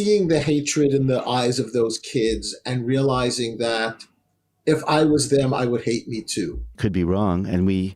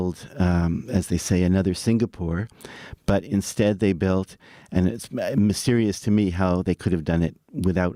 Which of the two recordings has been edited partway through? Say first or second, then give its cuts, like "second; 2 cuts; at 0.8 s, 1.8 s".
first; 1 cut; at 6.8 s